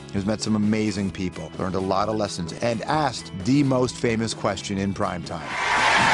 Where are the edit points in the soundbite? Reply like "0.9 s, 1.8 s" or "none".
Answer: none